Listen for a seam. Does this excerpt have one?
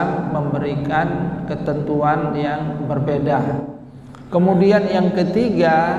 yes; 1 cut; at 3.8 s

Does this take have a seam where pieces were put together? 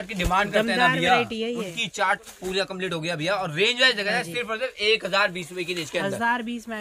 no; 0 cuts

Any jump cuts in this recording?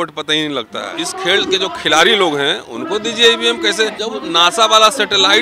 yes; 2 cuts; at 1.0 s, 4.0 s

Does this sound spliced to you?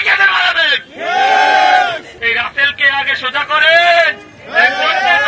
yes; 1 cut; at 2.1 s

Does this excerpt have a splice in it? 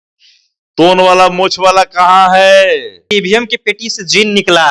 yes; 1 cut; at 3.1 s

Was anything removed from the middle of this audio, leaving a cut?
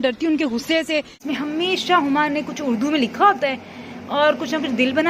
yes; 1 cut; at 1.2 s

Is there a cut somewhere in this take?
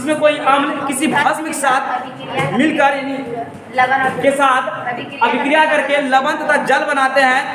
no; 0 cuts

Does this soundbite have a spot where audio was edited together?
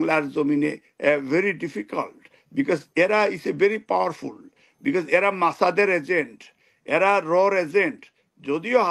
no; 0 cuts

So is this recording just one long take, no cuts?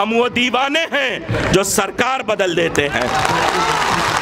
yes; 0 cuts

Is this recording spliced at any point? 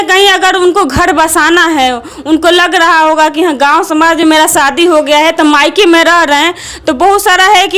no; 0 cuts

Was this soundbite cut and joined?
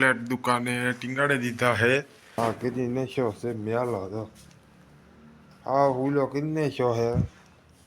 yes; 1 cut; at 2.4 s

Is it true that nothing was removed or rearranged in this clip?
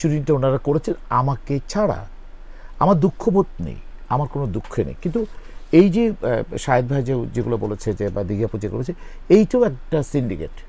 yes; 0 cuts

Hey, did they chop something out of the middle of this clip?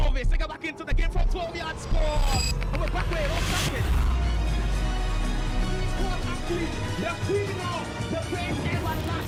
no; 0 cuts

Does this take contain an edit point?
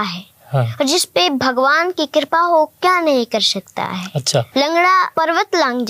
yes; 2 cuts; at 4.5 s, 5.1 s

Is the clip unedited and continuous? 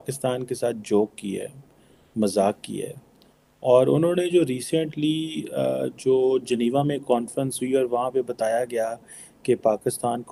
yes; 0 cuts

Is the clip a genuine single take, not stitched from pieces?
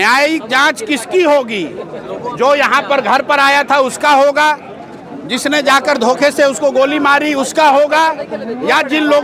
yes; 0 cuts

